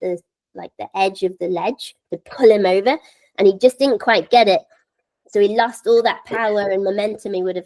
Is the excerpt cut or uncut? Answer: uncut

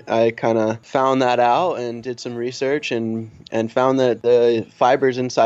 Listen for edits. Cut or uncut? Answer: cut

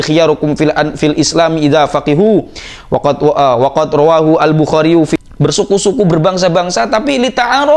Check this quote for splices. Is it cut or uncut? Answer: cut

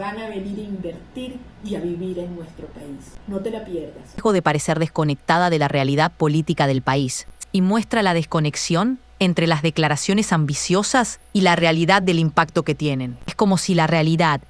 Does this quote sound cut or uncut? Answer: cut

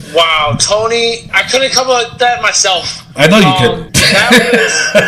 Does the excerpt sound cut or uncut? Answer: cut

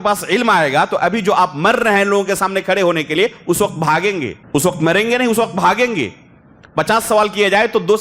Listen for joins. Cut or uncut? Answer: cut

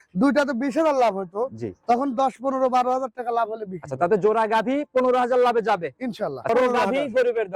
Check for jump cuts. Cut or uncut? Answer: cut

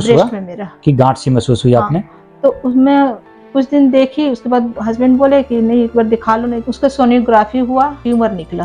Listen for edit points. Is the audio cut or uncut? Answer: cut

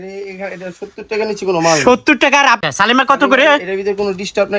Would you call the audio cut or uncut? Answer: cut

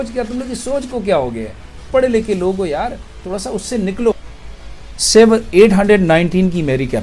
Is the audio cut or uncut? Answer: cut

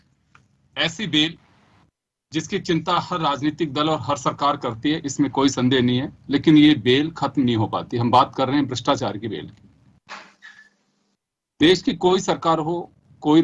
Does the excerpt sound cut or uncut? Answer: uncut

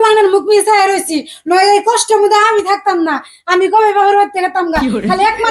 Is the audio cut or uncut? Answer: uncut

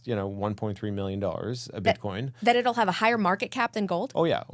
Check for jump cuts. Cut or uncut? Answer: uncut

